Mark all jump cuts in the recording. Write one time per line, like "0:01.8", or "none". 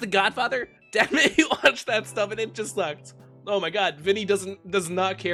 none